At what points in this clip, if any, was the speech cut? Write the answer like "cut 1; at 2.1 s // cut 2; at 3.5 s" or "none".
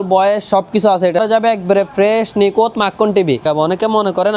cut 1; at 1.2 s // cut 2; at 3.4 s